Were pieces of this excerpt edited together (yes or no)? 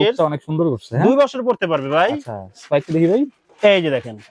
no